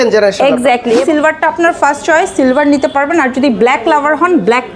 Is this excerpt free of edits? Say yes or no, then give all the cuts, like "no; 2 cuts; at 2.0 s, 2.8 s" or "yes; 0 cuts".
no; 1 cut; at 1.0 s